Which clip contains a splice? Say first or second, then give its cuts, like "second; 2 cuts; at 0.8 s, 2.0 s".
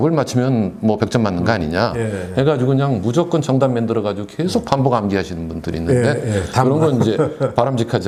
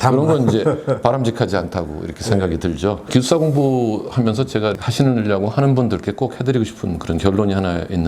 second; 2 cuts; at 3.1 s, 4.8 s